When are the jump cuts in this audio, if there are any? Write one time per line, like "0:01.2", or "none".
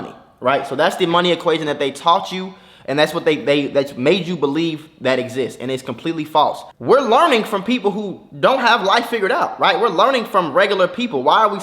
0:06.7